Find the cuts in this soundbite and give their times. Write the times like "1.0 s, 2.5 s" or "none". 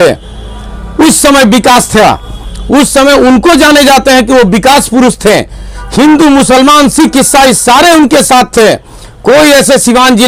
none